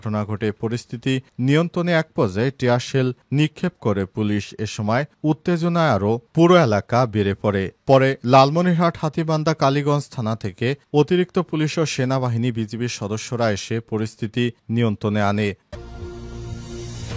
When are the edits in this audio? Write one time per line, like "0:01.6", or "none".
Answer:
0:15.6